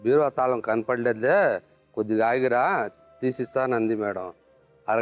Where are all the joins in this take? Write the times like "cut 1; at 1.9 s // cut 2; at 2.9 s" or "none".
none